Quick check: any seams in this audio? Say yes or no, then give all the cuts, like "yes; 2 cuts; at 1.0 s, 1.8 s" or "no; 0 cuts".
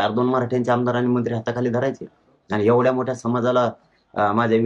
no; 0 cuts